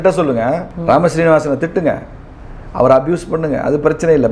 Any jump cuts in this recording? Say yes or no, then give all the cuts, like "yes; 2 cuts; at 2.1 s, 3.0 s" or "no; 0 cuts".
no; 0 cuts